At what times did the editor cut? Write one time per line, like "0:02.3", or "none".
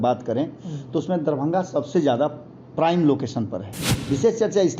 0:03.9